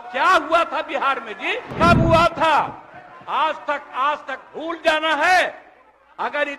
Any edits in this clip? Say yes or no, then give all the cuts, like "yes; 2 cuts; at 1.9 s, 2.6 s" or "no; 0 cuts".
yes; 1 cut; at 1.7 s